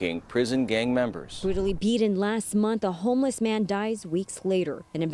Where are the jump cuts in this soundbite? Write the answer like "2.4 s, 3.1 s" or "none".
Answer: 1.3 s